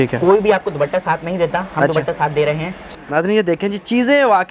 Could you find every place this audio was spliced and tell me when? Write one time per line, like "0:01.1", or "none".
0:02.8